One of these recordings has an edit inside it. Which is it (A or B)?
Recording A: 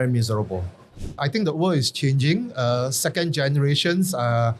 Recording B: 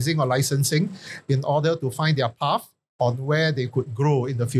A